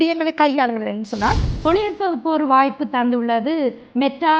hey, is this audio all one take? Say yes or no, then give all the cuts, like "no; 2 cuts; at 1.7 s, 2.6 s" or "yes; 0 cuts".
no; 1 cut; at 1.5 s